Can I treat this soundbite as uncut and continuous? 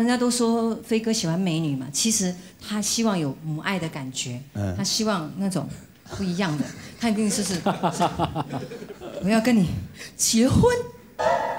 yes; 0 cuts

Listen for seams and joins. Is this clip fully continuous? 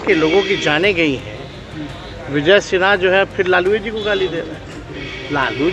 yes; 0 cuts

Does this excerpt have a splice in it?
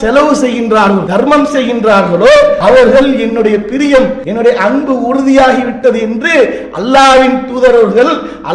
yes; 3 cuts; at 1.1 s, 2.6 s, 4.2 s

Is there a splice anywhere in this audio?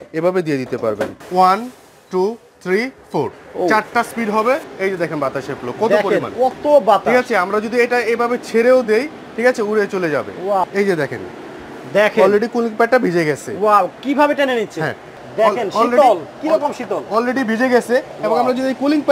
yes; 4 cuts; at 1.2 s, 4.7 s, 10.6 s, 15.1 s

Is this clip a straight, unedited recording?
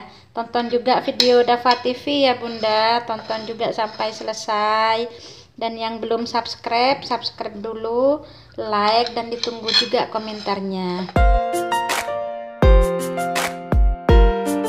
no; 1 cut; at 11.1 s

